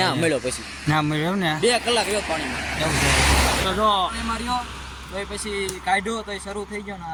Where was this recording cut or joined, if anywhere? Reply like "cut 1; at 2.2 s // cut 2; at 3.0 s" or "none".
none